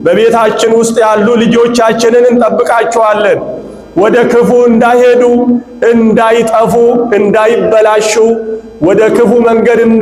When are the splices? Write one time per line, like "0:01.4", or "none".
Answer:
none